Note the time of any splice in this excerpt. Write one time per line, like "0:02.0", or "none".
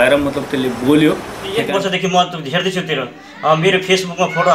0:01.5